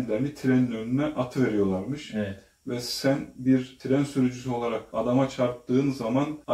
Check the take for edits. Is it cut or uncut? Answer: uncut